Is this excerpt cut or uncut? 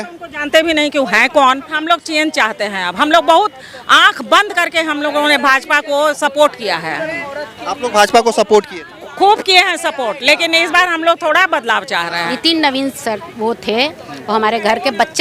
cut